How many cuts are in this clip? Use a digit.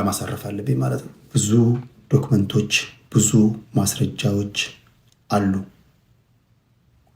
1